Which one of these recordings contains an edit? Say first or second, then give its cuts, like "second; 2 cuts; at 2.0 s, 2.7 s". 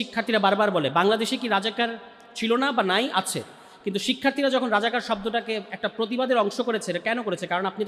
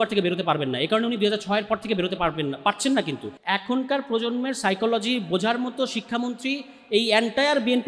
second; 1 cut; at 3.3 s